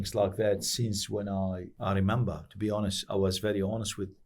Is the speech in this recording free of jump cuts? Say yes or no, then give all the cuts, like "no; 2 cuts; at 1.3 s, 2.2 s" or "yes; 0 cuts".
no; 1 cut; at 1.7 s